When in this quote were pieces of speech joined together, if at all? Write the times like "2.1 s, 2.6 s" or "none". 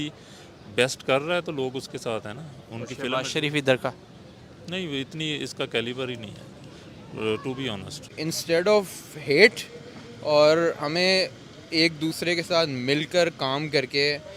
8.1 s